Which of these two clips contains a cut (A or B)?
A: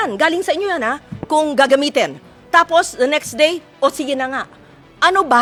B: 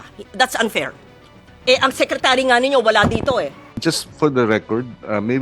B